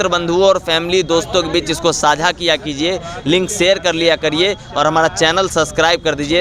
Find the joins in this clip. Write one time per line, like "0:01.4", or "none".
none